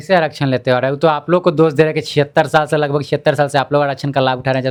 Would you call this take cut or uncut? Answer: uncut